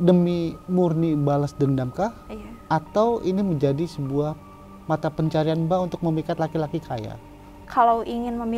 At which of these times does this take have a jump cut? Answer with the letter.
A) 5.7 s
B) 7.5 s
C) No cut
B